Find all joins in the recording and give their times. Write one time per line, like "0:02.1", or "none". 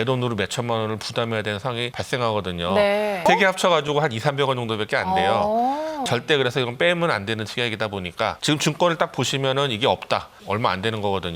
0:03.3
0:06.0
0:08.4
0:10.3